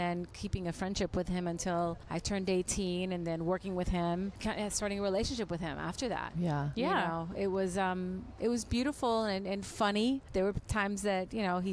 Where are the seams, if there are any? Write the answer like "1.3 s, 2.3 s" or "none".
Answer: 2.0 s, 4.4 s, 10.3 s